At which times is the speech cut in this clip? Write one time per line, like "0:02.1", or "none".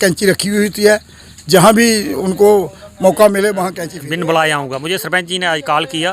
0:03.8